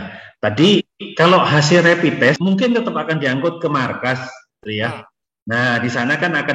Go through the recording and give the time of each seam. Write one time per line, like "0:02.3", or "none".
0:02.4